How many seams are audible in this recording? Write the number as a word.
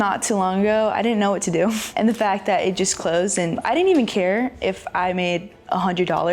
three